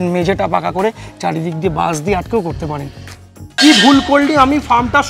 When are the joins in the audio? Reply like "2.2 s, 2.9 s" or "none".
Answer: 3.1 s